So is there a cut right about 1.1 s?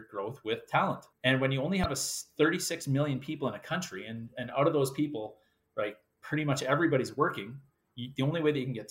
yes; 1 cut; at 1.1 s

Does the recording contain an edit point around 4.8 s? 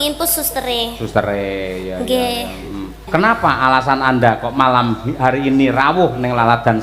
no; 1 cut; at 3.0 s

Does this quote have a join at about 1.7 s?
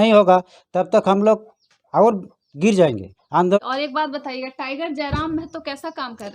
no; 1 cut; at 3.6 s

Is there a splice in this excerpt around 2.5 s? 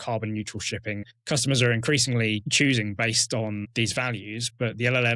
yes; 3 cuts; at 1.1 s, 2.5 s, 3.7 s

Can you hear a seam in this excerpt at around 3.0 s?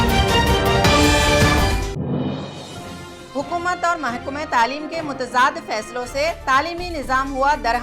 yes; 1 cut; at 3.0 s

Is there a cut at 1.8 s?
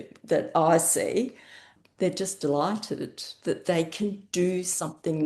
yes; 1 cut; at 1.8 s

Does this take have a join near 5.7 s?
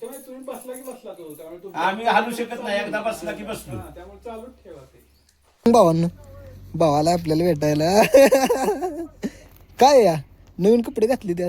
yes; 1 cut; at 5.7 s

